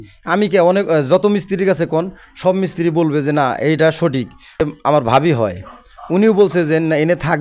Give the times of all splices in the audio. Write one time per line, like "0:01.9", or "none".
0:04.6